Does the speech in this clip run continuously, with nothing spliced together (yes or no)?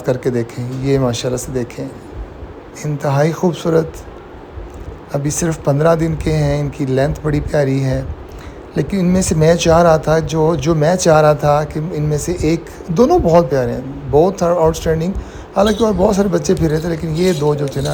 yes